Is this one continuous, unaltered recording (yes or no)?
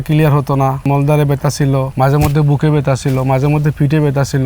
no